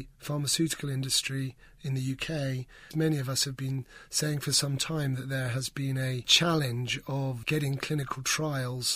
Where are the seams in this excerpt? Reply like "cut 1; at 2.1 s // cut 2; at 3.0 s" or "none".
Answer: cut 1; at 2.9 s // cut 2; at 6.3 s // cut 3; at 7.4 s